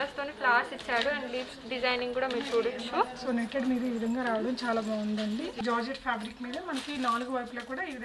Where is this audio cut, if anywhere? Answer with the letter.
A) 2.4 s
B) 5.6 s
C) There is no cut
B